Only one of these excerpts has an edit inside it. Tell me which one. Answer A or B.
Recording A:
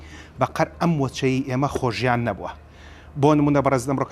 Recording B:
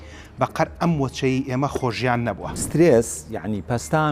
B